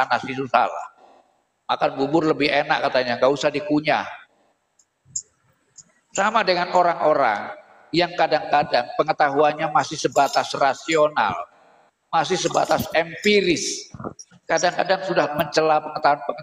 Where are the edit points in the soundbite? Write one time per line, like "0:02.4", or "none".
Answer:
0:15.3